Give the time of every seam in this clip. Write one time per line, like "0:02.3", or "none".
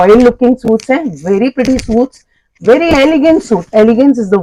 none